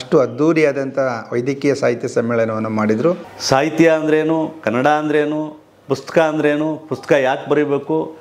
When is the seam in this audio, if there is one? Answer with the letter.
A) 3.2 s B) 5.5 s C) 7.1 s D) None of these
A